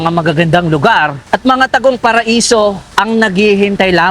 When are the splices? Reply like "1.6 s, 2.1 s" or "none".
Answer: 1.2 s, 2.8 s